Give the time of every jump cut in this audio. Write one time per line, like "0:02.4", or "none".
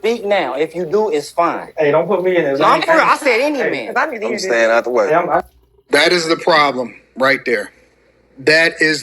0:05.4